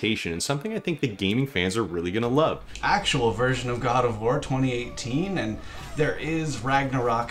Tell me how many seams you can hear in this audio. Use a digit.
1